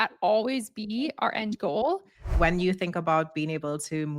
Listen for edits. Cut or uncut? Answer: cut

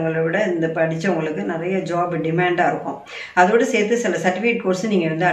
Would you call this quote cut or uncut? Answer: uncut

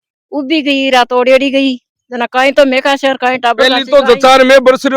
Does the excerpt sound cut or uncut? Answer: uncut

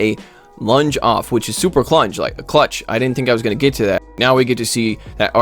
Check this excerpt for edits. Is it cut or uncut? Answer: cut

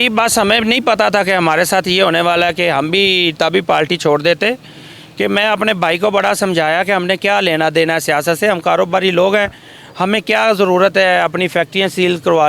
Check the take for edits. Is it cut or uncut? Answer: uncut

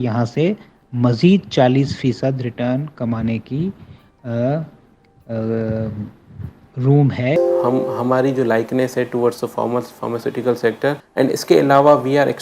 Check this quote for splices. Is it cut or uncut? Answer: cut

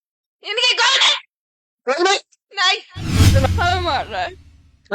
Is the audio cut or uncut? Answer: cut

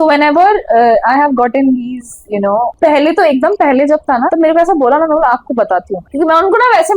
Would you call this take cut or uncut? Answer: cut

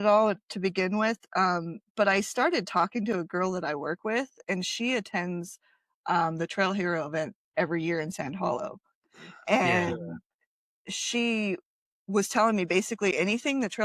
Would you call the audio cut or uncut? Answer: uncut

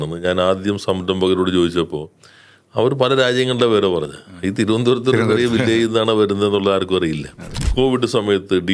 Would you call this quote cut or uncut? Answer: cut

